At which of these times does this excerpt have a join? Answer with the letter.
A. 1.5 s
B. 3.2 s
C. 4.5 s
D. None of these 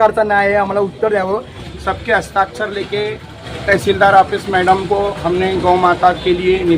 A